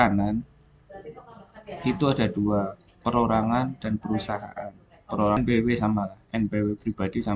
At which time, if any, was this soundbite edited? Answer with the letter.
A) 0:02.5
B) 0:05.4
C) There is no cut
B